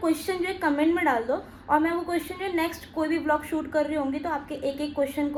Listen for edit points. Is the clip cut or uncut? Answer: uncut